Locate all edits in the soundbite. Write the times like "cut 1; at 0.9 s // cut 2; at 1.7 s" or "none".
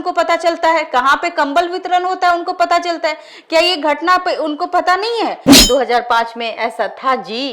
cut 1; at 5.5 s